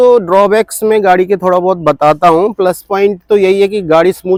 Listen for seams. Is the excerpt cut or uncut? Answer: uncut